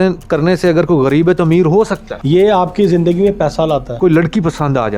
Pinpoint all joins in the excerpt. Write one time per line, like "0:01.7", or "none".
0:02.1
0:03.9